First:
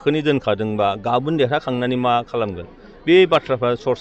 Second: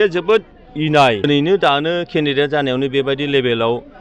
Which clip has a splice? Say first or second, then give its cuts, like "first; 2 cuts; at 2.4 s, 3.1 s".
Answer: second; 1 cut; at 1.3 s